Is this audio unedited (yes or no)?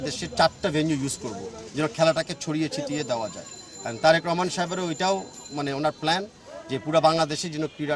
yes